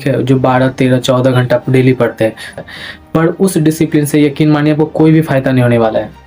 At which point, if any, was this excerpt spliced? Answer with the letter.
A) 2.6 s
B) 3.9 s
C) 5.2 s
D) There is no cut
A